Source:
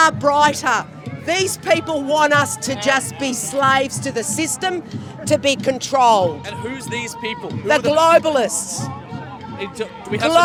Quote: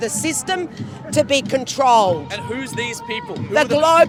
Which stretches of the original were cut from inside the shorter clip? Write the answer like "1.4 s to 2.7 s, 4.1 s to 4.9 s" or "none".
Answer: none